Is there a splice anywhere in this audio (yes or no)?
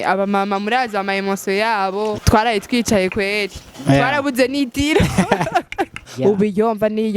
yes